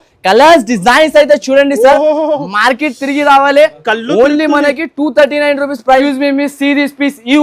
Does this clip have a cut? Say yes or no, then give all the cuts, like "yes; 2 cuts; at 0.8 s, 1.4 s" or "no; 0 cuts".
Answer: yes; 1 cut; at 6.0 s